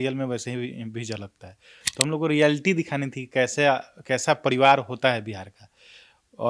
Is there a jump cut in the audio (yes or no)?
no